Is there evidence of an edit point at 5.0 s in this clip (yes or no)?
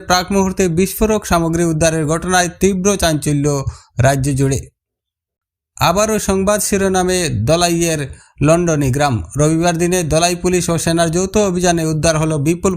yes